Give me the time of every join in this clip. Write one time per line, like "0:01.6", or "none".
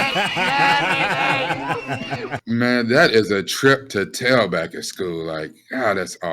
0:02.4